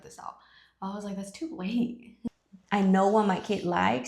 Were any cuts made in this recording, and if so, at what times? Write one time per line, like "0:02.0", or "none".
0:02.1